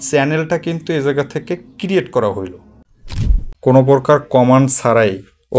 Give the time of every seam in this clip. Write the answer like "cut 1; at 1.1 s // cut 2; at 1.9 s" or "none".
cut 1; at 3.2 s